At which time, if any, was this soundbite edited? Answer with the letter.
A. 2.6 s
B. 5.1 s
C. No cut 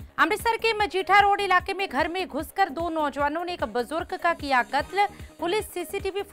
C